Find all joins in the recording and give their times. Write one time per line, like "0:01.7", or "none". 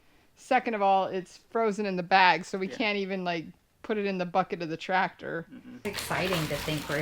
0:05.6